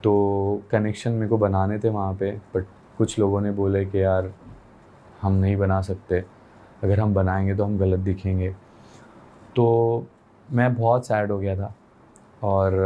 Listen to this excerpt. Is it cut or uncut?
uncut